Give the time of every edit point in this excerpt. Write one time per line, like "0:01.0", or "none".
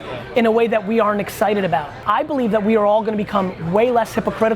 0:01.9